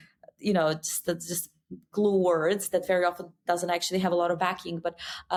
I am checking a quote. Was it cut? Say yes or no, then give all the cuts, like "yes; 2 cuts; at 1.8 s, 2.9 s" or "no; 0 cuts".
no; 0 cuts